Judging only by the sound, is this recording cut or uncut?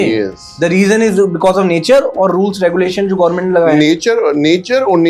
uncut